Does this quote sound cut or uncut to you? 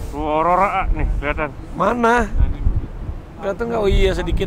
uncut